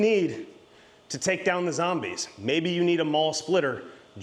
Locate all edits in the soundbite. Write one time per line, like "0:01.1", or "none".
none